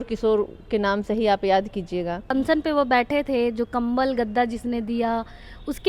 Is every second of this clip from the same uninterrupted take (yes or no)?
no